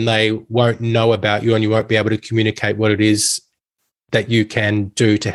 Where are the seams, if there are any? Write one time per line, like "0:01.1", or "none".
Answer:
none